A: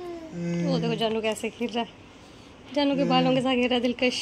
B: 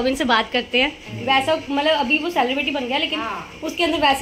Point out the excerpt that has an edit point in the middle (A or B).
B